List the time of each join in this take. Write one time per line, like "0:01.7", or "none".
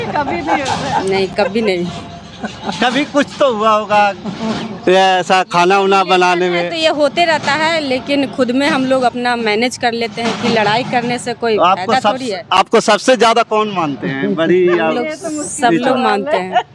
none